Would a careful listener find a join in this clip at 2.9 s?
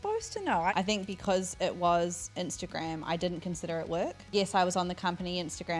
no; 2 cuts; at 0.7 s, 4.3 s

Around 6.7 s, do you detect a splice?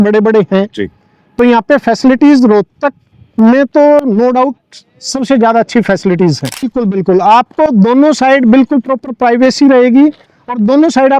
yes; 1 cut; at 6.7 s

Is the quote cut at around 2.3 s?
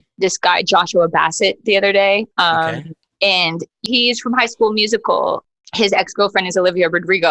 no; 2 cuts; at 3.8 s, 5.5 s

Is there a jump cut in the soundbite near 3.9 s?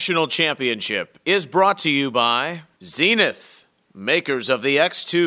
no; 1 cut; at 2.6 s

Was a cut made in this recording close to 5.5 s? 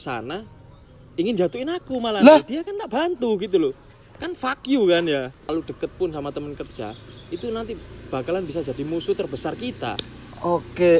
yes; 1 cut; at 5.5 s

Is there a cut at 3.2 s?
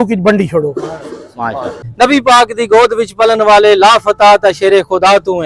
no; 1 cut; at 1.7 s

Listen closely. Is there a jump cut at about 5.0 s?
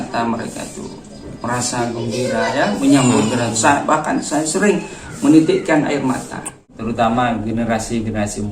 no; 1 cut; at 6.7 s

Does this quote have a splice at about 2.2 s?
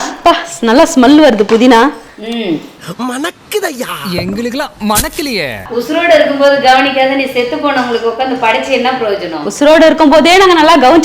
no; 1 cut; at 5.7 s

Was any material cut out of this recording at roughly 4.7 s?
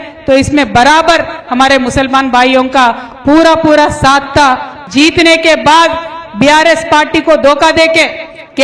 yes; 1 cut; at 4.7 s

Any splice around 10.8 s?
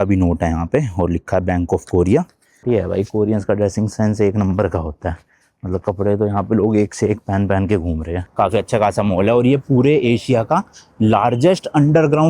no; 2 cuts; at 2.6 s, 8.2 s

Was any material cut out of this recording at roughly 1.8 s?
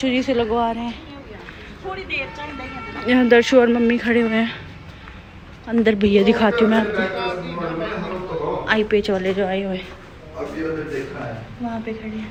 no; 0 cuts

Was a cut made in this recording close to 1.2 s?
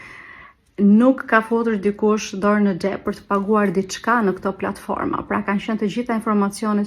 yes; 1 cut; at 1.2 s

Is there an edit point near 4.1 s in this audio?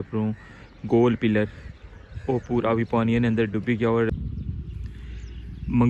yes; 1 cut; at 4.1 s

